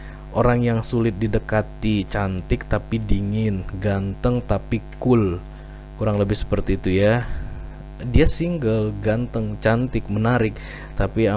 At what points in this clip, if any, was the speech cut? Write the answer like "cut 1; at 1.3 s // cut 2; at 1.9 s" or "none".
none